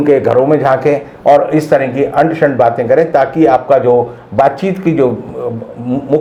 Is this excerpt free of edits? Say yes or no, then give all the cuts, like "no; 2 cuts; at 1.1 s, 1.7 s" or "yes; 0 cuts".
yes; 0 cuts